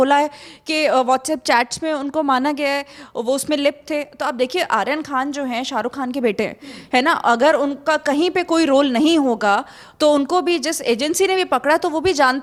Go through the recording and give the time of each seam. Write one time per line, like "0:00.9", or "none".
none